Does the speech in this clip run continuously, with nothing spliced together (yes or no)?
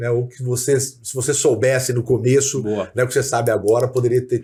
yes